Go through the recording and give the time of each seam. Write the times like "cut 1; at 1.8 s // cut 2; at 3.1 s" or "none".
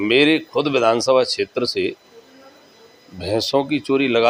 none